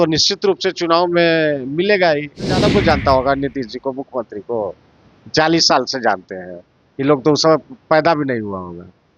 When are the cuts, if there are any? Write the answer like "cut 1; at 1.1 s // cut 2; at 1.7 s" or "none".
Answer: cut 1; at 2.6 s